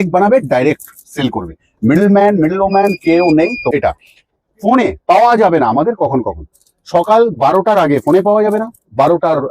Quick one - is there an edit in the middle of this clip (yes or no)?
yes